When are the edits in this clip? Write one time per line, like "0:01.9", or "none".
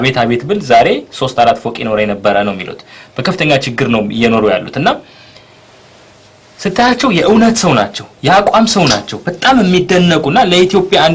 none